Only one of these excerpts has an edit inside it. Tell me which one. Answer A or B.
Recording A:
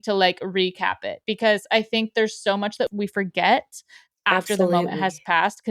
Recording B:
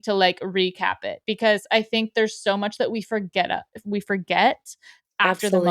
A